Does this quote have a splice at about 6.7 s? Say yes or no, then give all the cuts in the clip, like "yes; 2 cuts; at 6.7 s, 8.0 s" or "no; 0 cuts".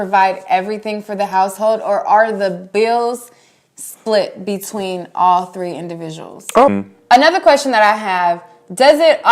yes; 1 cut; at 6.7 s